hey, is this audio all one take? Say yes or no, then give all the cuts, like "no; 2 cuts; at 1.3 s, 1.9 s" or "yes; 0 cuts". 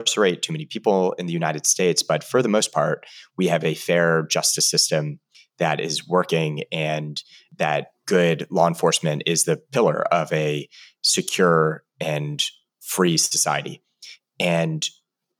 yes; 0 cuts